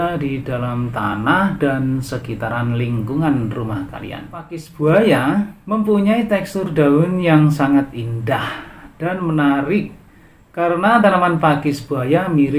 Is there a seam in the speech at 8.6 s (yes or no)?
no